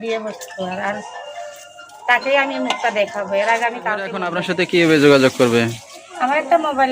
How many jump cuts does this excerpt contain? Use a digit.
1